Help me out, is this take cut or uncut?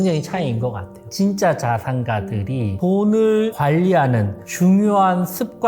cut